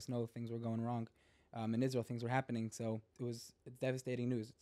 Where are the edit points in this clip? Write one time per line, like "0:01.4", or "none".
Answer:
0:03.1

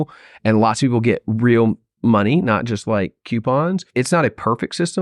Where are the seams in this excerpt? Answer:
0:03.9

